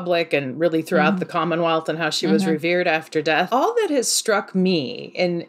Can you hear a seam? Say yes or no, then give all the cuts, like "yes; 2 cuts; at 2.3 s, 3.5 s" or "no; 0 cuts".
yes; 1 cut; at 3.5 s